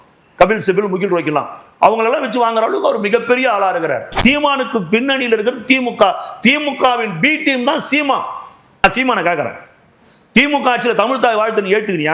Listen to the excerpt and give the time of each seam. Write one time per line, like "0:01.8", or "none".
0:04.1
0:08.8